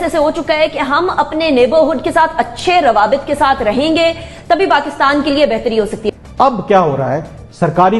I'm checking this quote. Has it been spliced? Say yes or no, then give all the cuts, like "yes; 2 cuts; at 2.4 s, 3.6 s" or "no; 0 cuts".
yes; 1 cut; at 6.1 s